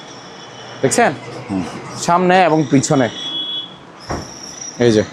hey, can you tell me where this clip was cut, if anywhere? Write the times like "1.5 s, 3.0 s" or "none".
none